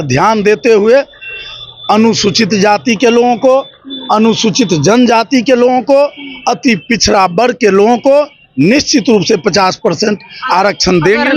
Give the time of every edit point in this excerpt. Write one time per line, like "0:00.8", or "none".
none